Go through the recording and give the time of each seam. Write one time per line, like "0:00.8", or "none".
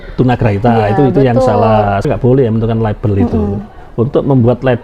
0:02.1